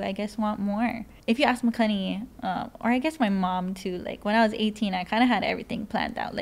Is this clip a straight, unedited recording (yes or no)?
no